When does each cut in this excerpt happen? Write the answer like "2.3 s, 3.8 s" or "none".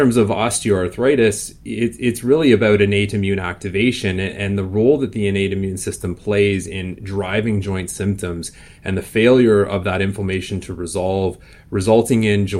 none

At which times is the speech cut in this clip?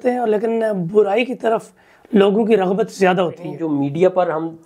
3.5 s

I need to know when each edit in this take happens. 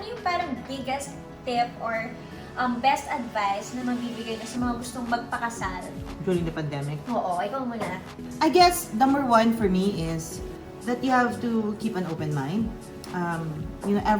none

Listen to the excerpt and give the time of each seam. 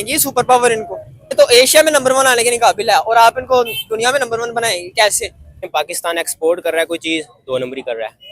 1.4 s, 5.6 s

